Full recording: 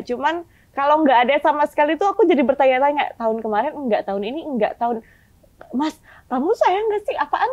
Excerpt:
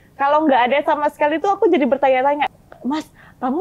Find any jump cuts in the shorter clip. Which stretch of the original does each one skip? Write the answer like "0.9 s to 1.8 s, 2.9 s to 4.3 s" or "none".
3.1 s to 5.5 s